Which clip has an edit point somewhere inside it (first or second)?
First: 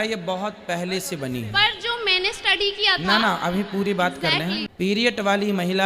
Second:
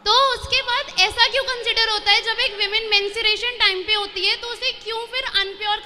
first